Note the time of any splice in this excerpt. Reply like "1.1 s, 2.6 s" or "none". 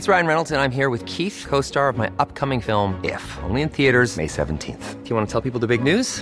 none